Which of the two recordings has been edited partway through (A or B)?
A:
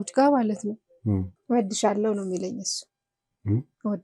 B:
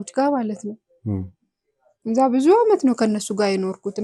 A